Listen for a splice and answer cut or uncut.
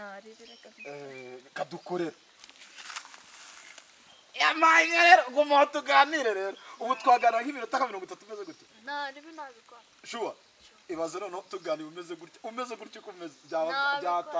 uncut